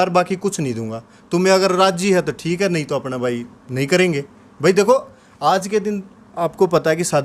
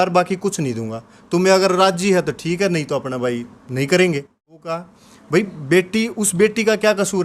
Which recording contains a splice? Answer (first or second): second